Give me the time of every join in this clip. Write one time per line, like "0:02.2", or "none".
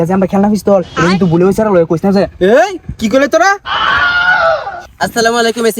0:04.8